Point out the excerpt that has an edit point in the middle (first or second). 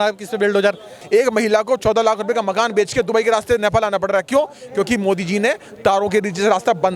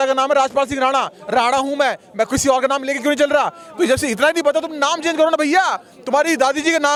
first